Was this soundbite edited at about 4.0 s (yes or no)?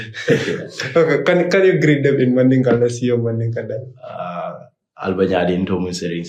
no